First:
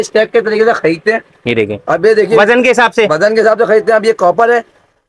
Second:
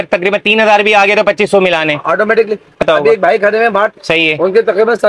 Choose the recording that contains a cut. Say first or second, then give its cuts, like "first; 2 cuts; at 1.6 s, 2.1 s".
second; 2 cuts; at 2.8 s, 4.0 s